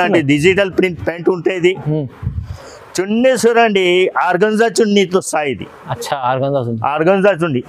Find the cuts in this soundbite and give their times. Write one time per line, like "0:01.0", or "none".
none